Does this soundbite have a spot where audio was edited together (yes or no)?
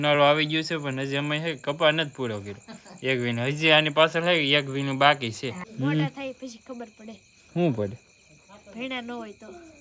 yes